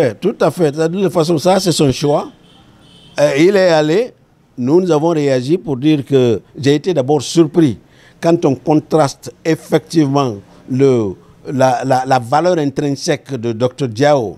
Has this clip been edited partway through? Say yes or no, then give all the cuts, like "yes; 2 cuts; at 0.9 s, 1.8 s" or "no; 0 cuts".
no; 0 cuts